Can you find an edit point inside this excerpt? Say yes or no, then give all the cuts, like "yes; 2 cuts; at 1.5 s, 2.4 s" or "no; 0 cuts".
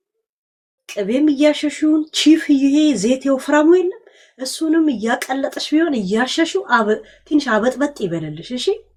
no; 0 cuts